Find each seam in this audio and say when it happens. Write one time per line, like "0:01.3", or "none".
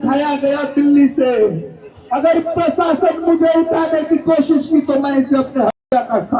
none